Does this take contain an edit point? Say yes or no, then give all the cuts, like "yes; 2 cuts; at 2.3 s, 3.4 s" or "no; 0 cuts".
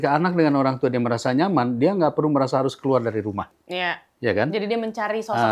yes; 1 cut; at 3.5 s